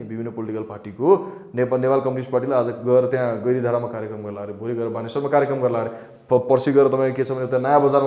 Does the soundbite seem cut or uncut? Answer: uncut